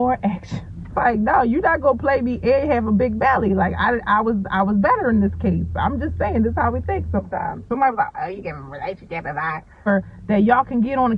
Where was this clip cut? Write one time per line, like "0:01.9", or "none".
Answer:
0:00.9
0:07.7
0:09.9